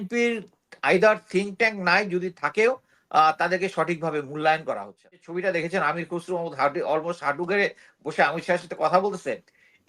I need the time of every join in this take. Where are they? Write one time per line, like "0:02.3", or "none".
0:05.2